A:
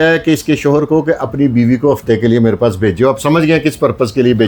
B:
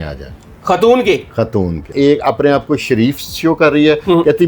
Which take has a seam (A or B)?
B